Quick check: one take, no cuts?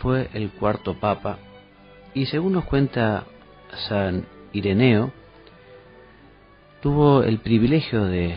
no; 1 cut; at 5.2 s

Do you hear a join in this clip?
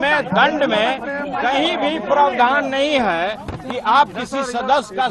no; 0 cuts

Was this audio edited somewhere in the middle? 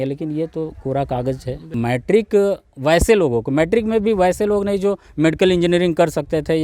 yes; 1 cut; at 1.7 s

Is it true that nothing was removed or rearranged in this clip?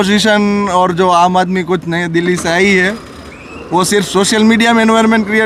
yes; 0 cuts

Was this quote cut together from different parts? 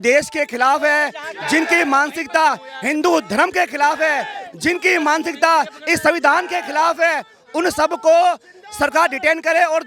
no; 0 cuts

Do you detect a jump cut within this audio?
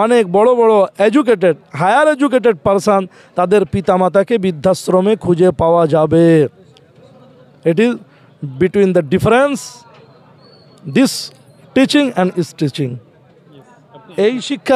no; 0 cuts

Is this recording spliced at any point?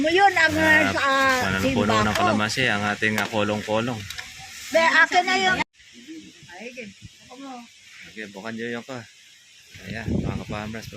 yes; 1 cut; at 5.6 s

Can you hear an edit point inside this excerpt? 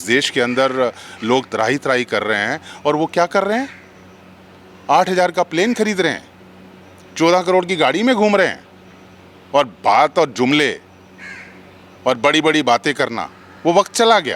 no; 0 cuts

